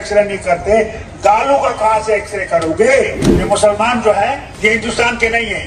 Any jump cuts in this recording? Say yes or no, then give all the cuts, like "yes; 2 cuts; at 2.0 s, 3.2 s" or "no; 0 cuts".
yes; 2 cuts; at 3.3 s, 4.5 s